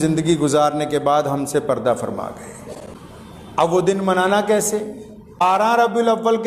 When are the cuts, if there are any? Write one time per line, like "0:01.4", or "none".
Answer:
0:02.9
0:05.4